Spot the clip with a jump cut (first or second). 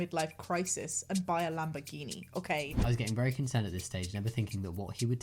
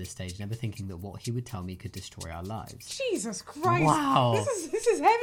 first